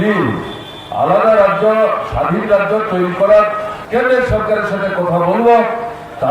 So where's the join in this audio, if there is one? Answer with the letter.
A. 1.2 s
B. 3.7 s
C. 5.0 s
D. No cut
B